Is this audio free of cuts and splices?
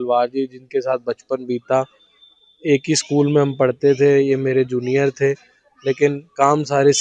yes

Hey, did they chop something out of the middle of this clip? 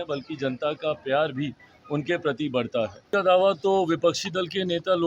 yes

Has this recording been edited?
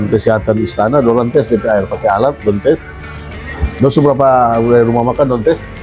no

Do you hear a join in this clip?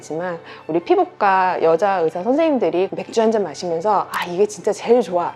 yes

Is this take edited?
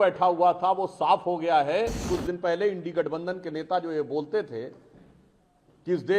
yes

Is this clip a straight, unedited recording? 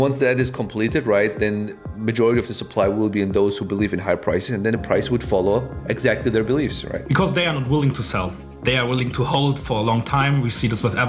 yes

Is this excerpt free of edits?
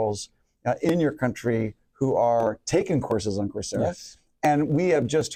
yes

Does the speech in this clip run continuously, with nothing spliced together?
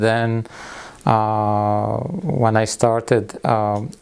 yes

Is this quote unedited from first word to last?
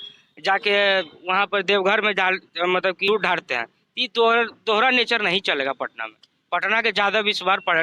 no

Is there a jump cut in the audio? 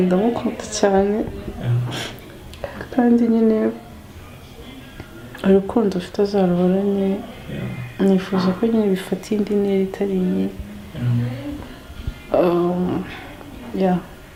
no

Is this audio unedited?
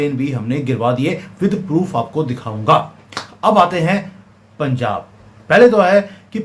yes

